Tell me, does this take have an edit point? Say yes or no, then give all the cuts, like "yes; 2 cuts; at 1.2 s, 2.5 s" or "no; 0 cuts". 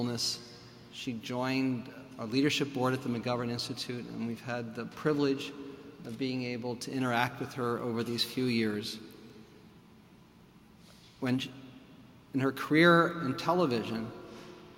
no; 0 cuts